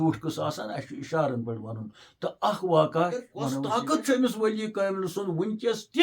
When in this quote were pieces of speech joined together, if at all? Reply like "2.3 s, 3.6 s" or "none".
3.6 s